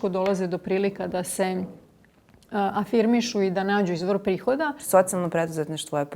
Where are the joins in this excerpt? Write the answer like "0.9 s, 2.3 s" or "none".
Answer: 4.8 s